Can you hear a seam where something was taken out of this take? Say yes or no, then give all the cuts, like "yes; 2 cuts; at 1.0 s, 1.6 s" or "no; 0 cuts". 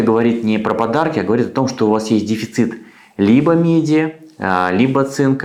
no; 0 cuts